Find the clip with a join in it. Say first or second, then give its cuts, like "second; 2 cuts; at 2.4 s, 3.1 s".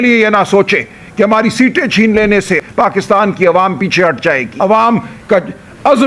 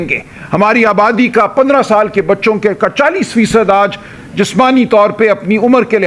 first; 2 cuts; at 2.6 s, 4.5 s